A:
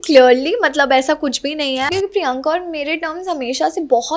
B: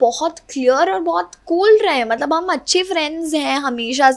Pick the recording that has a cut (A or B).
A